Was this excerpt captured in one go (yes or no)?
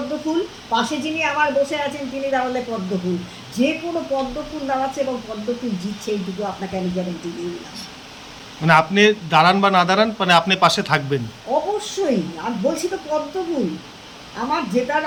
yes